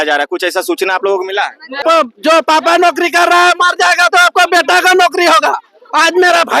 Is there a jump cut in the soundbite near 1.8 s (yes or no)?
yes